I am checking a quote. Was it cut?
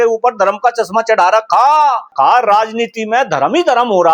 yes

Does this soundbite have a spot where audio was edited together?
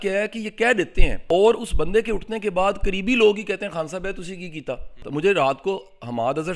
yes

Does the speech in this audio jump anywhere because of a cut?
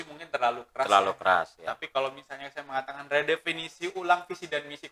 no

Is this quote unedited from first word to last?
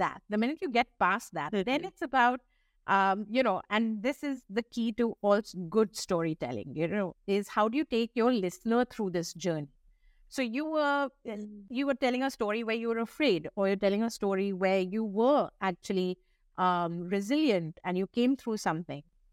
yes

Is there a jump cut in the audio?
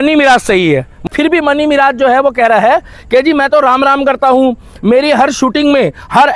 yes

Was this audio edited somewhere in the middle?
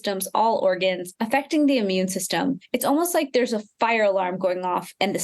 yes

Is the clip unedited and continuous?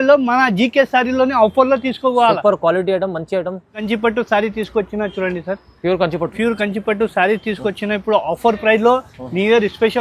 no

